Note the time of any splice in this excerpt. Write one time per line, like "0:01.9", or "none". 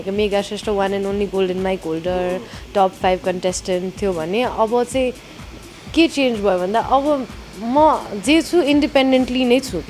none